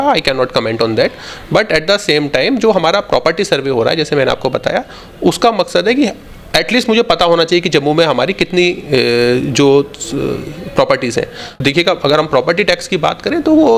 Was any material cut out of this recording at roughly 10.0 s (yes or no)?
no